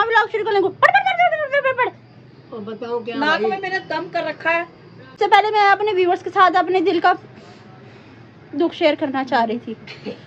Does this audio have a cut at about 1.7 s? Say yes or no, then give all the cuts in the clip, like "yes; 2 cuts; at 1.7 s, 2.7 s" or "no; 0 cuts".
yes; 2 cuts; at 1.7 s, 5.1 s